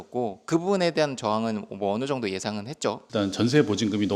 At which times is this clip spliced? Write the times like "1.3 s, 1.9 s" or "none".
3.1 s